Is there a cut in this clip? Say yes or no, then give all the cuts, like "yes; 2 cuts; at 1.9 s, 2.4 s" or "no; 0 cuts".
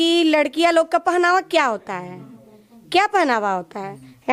no; 0 cuts